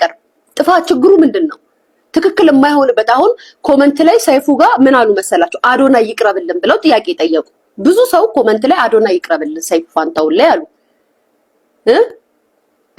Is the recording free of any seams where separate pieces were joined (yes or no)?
yes